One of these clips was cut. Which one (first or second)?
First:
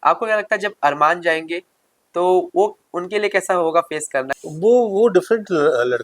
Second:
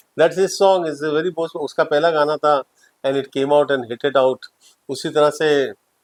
first